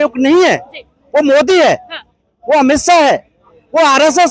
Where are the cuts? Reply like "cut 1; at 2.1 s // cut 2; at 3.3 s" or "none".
none